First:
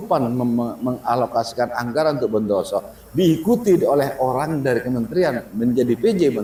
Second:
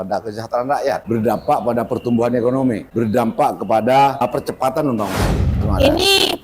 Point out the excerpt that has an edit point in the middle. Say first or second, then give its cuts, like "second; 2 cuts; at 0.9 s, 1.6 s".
second; 4 cuts; at 1.0 s, 2.9 s, 4.2 s, 5.6 s